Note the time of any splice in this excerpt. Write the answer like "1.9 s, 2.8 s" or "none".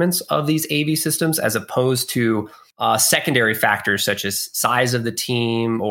2.6 s